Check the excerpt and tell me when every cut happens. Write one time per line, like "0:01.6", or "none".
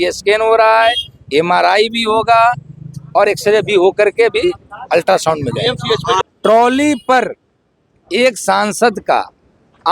0:06.2